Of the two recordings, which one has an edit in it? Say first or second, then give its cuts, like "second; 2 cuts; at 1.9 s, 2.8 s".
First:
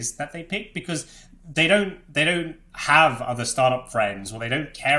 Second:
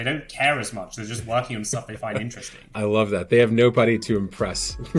second; 1 cut; at 2.1 s